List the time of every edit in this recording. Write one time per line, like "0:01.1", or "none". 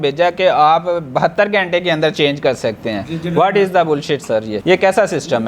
0:04.5